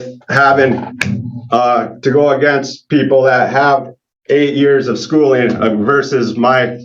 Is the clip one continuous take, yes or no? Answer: yes